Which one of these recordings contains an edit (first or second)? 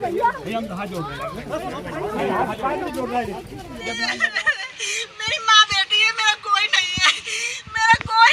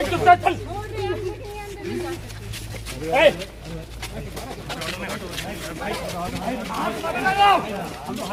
first